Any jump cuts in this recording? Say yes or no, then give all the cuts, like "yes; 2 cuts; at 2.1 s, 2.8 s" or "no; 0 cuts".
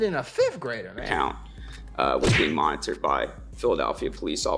no; 0 cuts